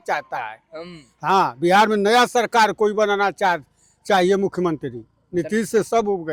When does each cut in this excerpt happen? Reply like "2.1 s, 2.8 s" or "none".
none